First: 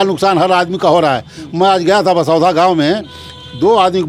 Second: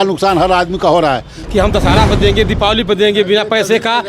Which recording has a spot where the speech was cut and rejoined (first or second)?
second